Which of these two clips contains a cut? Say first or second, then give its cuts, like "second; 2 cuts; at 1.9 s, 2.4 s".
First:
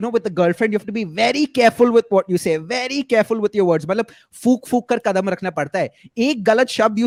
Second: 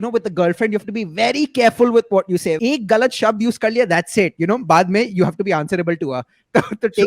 second; 1 cut; at 2.6 s